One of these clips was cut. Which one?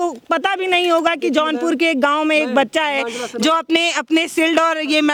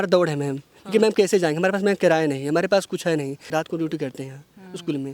second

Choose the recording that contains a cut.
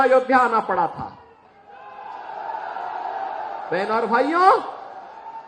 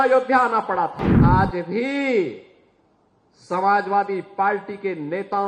second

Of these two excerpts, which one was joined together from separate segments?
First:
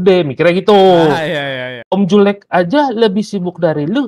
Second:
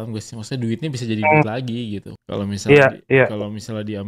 first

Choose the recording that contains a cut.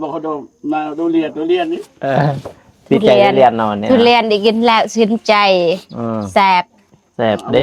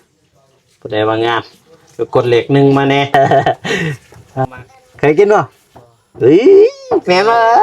second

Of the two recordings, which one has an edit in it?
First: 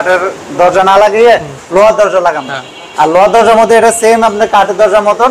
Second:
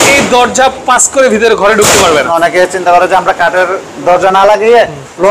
second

